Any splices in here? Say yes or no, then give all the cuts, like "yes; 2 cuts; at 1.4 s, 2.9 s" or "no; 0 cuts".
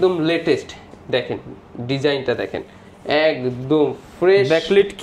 no; 0 cuts